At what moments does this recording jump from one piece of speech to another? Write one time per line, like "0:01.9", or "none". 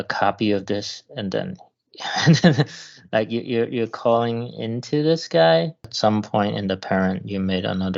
0:05.9